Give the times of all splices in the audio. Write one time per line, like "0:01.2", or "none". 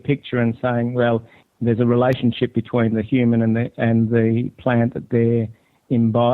0:01.3